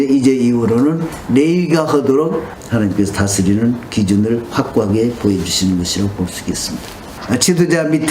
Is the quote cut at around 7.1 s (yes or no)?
yes